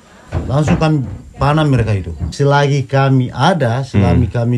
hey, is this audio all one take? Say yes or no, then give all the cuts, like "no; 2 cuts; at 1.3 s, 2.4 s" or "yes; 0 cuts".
no; 1 cut; at 2.3 s